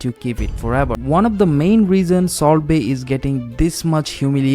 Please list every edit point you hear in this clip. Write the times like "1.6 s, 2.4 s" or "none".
1.0 s